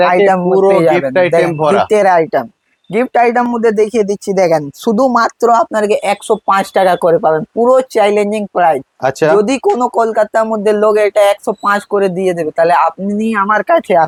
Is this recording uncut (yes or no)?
yes